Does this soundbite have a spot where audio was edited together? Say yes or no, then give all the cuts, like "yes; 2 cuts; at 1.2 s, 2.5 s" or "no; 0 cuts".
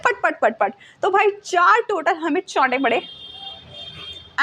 no; 0 cuts